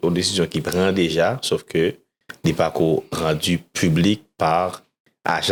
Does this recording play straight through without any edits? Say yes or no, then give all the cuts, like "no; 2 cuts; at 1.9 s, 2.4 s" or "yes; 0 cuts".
yes; 0 cuts